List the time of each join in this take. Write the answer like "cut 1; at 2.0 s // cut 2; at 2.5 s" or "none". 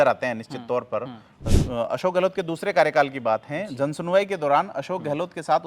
cut 1; at 1.4 s